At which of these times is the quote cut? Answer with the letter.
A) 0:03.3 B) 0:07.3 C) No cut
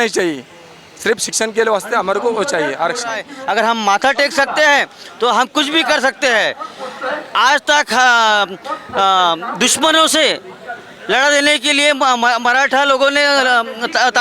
A